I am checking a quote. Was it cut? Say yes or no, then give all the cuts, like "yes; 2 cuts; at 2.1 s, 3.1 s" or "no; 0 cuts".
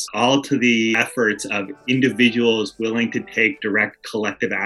no; 0 cuts